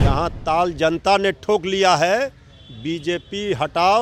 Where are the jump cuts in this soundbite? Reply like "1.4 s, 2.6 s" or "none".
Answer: none